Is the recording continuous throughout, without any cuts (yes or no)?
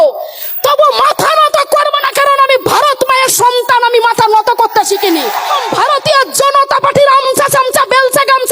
no